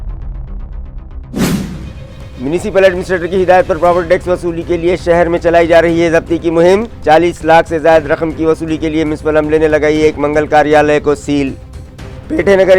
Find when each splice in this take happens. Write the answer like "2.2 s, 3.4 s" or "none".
2.0 s